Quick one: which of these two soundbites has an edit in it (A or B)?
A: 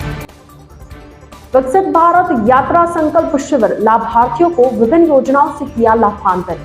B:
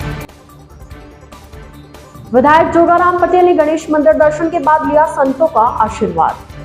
A